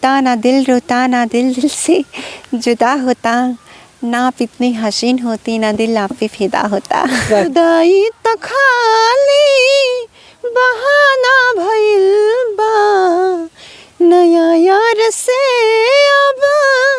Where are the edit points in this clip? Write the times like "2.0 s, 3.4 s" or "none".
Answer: 7.5 s

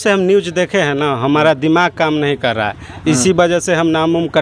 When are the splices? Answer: none

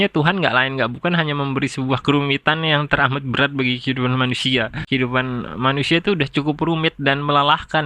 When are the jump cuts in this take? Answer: 4.8 s

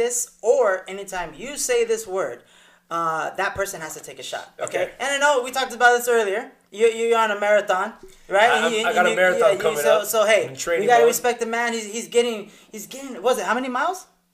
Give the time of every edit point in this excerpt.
none

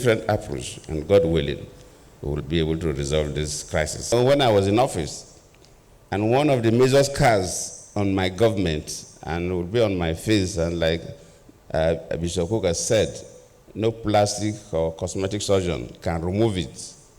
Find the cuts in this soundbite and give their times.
4.1 s

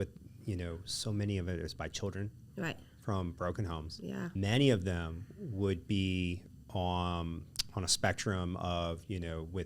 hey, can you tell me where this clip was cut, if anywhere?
4.3 s

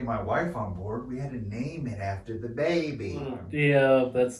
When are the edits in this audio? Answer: 3.5 s

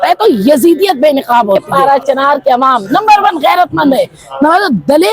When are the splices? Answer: 1.7 s

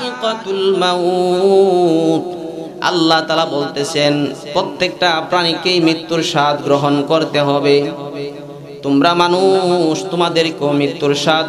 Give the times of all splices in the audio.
none

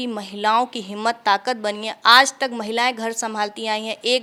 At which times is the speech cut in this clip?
none

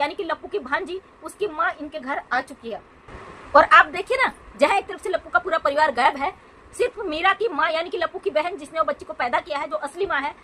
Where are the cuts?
none

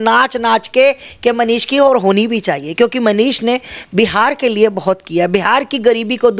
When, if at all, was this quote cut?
none

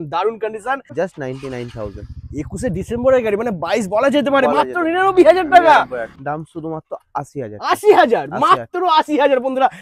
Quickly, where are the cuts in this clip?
0.9 s, 6.1 s

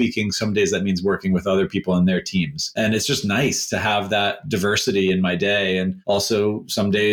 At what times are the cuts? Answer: 2.7 s, 6.0 s

